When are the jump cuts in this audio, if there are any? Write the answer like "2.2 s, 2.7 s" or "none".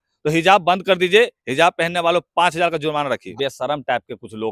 3.3 s